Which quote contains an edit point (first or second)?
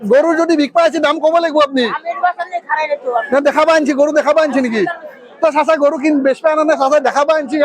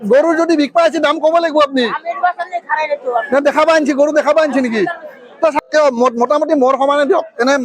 second